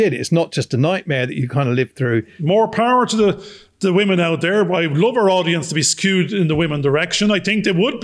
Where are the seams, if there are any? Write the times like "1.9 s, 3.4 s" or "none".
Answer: 2.3 s